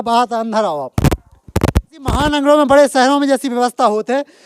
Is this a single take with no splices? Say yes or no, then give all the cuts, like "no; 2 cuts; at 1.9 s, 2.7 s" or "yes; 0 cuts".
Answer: no; 1 cut; at 2.2 s